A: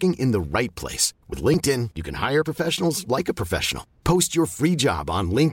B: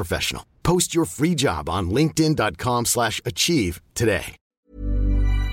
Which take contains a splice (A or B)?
B